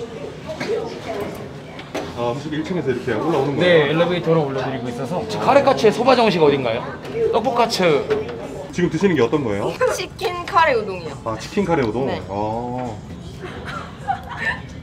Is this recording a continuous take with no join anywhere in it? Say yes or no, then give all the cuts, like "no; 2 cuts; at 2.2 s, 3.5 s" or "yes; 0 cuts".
yes; 0 cuts